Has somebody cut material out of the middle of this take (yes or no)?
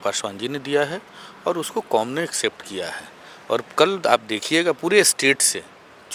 no